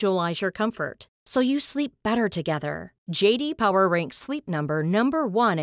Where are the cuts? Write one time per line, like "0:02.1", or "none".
none

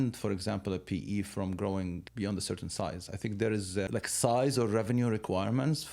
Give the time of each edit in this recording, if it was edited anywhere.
0:02.1
0:03.9

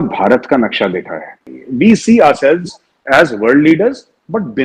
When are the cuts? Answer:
0:01.6

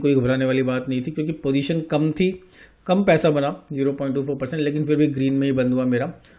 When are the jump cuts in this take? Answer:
none

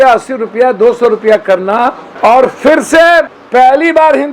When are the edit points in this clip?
0:02.0
0:03.4

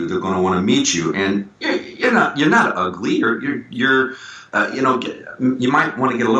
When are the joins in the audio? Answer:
none

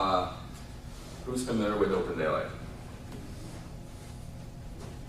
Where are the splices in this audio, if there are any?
0:01.2

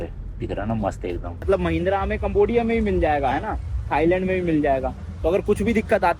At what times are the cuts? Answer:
0:01.4

